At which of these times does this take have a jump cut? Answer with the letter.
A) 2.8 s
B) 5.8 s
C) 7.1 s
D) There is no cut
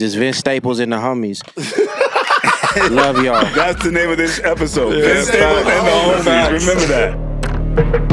C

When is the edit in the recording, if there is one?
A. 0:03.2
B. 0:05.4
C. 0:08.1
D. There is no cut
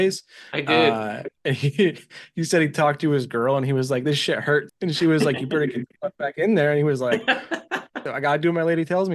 C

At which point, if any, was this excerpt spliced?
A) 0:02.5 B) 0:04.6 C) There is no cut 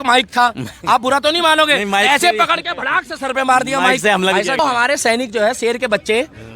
B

